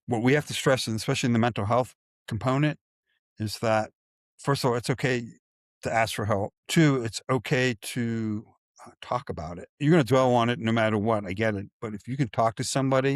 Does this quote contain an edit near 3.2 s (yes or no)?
no